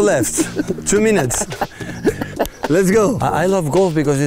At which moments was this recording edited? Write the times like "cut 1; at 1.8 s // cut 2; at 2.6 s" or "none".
cut 1; at 3.2 s